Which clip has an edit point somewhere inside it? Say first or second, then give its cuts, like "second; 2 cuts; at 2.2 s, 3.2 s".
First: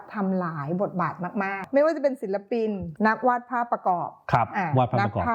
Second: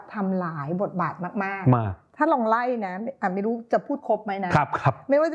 first; 2 cuts; at 1.6 s, 2.9 s